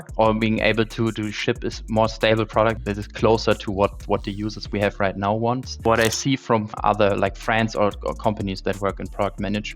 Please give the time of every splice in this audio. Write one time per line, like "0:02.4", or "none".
0:02.8